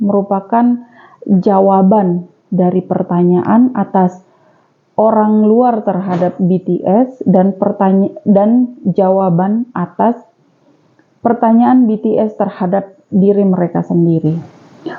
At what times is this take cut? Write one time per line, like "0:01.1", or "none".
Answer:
none